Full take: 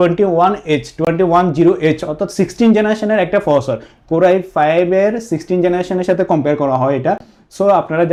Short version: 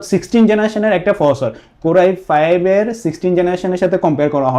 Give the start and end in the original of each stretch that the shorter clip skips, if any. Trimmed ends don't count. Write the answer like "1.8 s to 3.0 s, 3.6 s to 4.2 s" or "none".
none